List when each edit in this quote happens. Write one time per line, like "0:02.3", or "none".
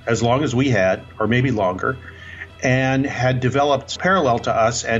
0:04.0